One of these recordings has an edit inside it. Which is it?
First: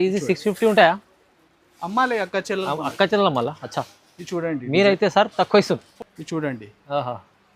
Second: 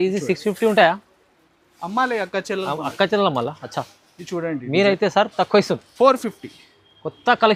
first; 1 cut; at 5.9 s

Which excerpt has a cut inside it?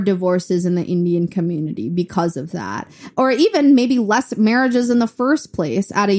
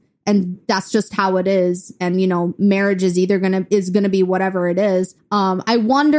second; 1 cut; at 5.2 s

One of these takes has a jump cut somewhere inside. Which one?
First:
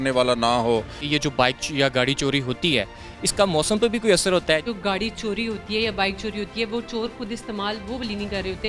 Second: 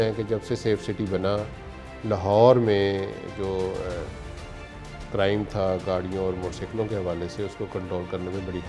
first; 2 cuts; at 1.0 s, 4.6 s

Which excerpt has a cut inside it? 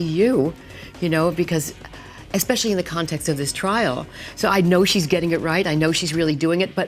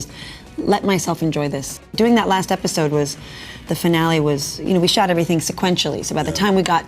second; 1 cut; at 1.9 s

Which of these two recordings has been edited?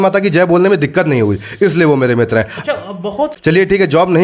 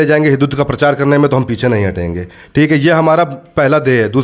first; 1 cut; at 3.3 s

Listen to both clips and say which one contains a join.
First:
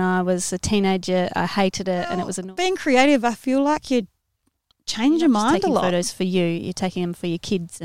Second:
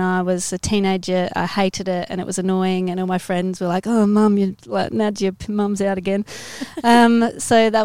first; 2 cuts; at 2.4 s, 5.9 s

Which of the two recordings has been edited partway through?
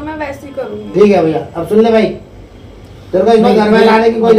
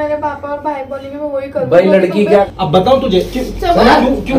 second; 1 cut; at 2.4 s

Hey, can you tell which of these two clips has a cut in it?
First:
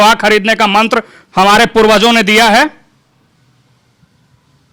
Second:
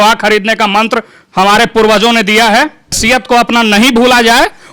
second; 1 cut; at 3.0 s

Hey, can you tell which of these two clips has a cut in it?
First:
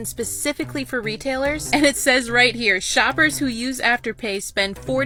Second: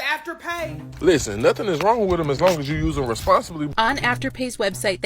second; 2 cuts; at 0.9 s, 3.7 s

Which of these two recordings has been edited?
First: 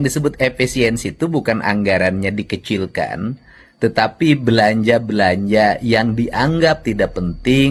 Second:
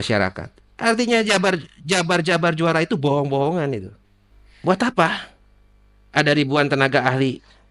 second; 1 cut; at 3.9 s

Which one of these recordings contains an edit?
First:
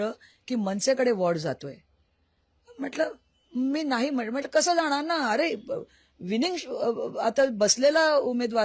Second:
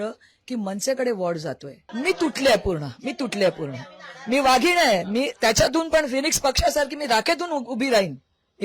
second; 1 cut; at 1.8 s

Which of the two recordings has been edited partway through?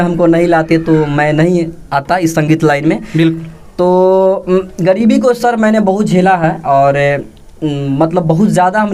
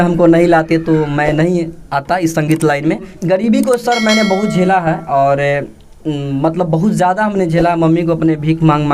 second; 1 cut; at 3.1 s

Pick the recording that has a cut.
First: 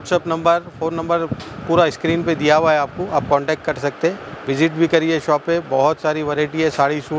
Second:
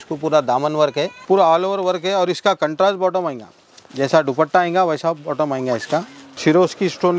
second; 2 cuts; at 1.2 s, 6.2 s

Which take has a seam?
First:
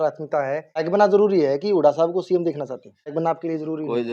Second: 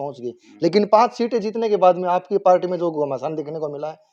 first; 2 cuts; at 0.9 s, 3.1 s

